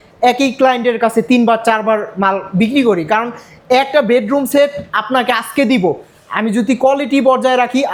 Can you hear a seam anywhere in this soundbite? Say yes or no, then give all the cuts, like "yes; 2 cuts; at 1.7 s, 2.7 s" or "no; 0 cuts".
no; 0 cuts